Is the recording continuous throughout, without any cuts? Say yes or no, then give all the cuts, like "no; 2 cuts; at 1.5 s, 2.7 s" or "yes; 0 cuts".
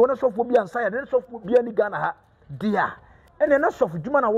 yes; 0 cuts